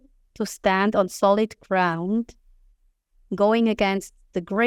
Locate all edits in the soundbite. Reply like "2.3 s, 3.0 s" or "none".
none

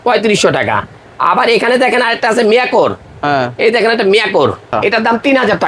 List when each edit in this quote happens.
4.7 s

